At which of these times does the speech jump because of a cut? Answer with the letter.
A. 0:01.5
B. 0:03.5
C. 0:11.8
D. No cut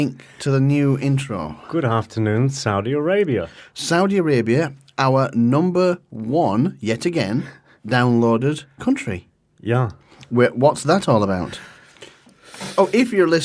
D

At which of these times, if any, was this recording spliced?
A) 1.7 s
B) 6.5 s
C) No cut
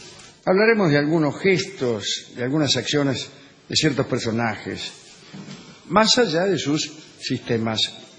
A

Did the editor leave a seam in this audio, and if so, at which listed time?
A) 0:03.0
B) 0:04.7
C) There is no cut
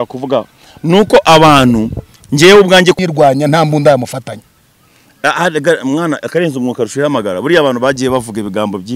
A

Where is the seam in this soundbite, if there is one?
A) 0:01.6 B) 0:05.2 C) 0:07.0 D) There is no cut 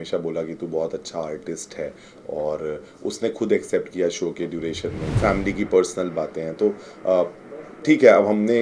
B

